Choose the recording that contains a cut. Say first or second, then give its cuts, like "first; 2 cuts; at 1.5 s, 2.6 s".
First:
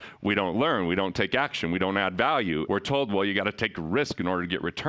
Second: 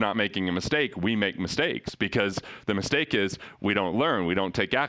first; 1 cut; at 2.6 s